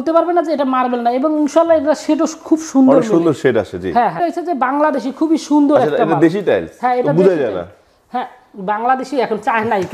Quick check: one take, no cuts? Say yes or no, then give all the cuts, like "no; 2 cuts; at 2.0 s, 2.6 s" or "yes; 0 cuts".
no; 1 cut; at 4.2 s